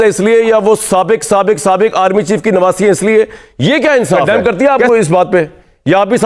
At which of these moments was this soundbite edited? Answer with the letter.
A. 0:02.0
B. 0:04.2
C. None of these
B